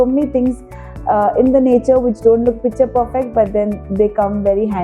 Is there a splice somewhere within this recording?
no; 0 cuts

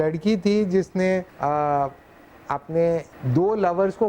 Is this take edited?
yes; 2 cuts; at 1.3 s, 3.2 s

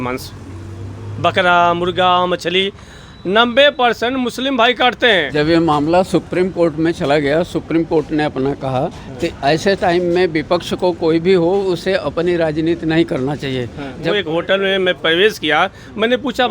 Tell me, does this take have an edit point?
yes; 2 cuts; at 5.3 s, 14.1 s

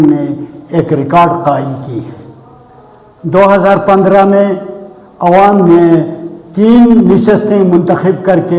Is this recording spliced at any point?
no; 0 cuts

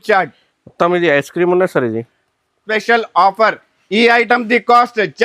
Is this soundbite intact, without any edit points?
no; 1 cut; at 2.7 s

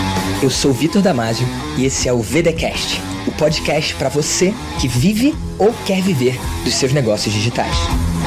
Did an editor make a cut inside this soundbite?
no; 0 cuts

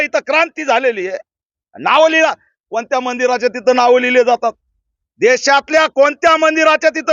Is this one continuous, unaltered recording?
yes; 0 cuts

